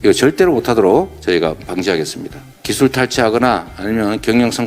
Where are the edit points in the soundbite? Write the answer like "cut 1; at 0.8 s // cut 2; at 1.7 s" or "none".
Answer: none